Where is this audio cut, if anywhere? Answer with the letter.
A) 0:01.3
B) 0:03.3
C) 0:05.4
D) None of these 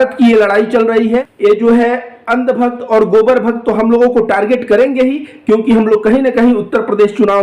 A